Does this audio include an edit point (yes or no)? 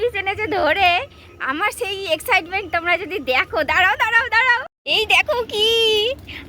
yes